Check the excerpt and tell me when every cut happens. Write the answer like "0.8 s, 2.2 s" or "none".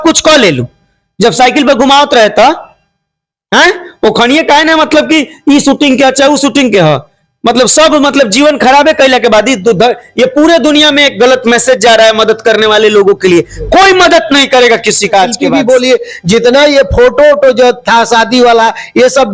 15.4 s

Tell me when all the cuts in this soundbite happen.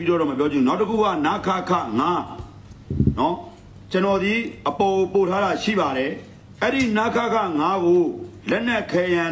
none

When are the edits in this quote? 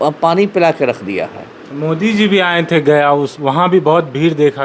none

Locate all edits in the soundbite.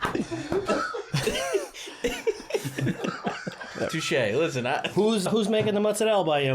5.3 s

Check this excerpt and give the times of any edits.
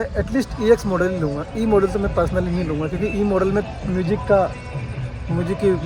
none

